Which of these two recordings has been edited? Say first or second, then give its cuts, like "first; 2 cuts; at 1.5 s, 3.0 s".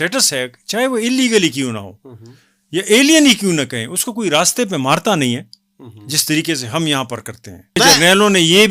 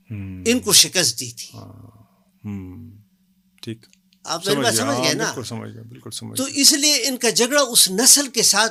first; 1 cut; at 7.8 s